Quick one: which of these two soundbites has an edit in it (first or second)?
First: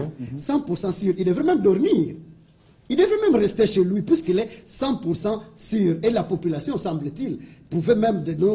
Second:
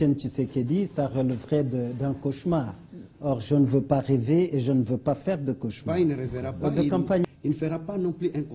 second